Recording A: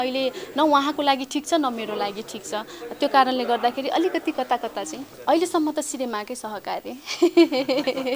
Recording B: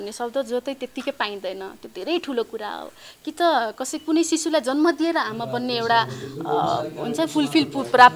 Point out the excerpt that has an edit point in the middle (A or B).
A